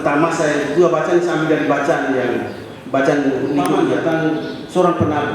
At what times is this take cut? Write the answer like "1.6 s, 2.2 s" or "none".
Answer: 3.7 s

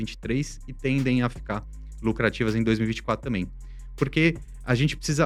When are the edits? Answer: none

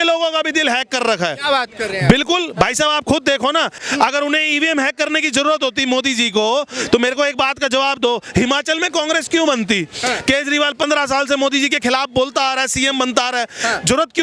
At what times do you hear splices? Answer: 3.8 s

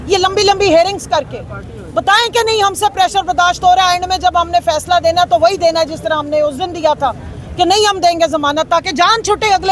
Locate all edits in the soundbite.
none

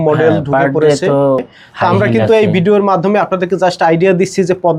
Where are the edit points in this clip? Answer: 1.6 s

